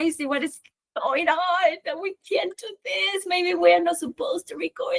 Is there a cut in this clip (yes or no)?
no